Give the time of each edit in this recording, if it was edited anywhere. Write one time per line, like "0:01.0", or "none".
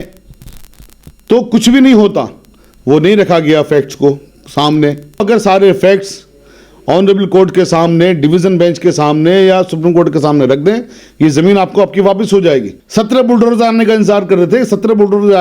0:05.2
0:12.8